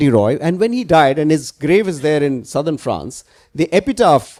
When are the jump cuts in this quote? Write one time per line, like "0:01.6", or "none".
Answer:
none

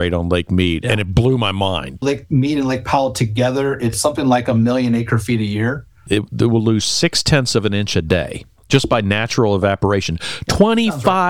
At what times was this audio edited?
0:02.0
0:06.0

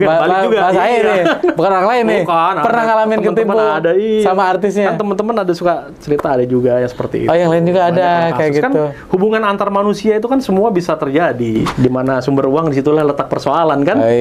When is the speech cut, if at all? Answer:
0:11.7

